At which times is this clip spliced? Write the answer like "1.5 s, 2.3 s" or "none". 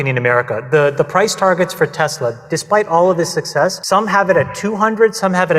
3.8 s